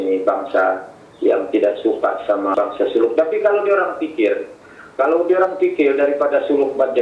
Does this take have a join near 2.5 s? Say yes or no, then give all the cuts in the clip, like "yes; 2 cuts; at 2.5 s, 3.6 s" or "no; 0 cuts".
yes; 1 cut; at 2.5 s